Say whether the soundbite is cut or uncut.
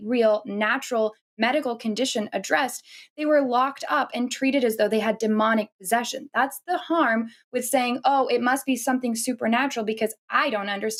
uncut